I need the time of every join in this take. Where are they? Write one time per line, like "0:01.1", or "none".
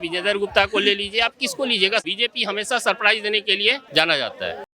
0:02.0
0:03.8